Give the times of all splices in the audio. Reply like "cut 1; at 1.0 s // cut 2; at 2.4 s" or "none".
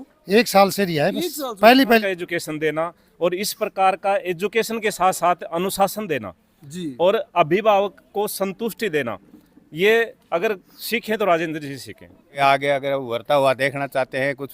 cut 1; at 2.0 s // cut 2; at 12.4 s